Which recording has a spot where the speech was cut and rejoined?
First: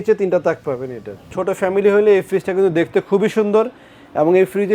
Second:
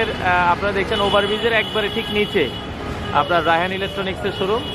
first; 1 cut; at 1.3 s

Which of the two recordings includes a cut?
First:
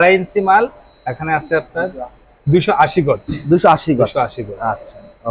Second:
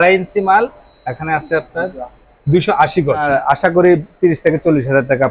second; 1 cut; at 3.4 s

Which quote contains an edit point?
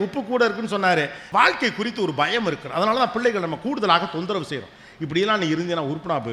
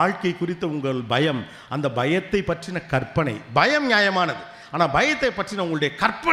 first; 1 cut; at 1.2 s

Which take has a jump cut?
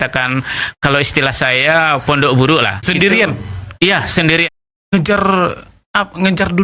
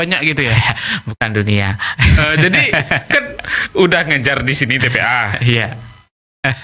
first; 2 cuts; at 2.9 s, 4.6 s

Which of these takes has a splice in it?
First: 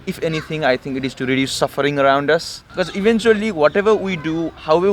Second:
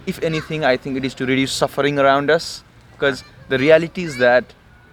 first; 1 cut; at 2.6 s

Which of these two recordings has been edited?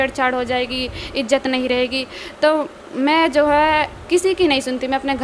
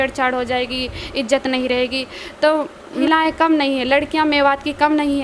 second; 1 cut; at 3.0 s

